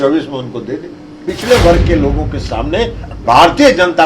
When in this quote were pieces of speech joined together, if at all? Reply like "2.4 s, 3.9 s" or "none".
1.3 s